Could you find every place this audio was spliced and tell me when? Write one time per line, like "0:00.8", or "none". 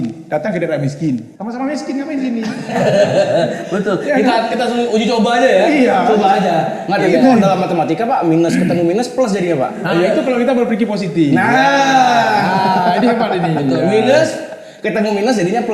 none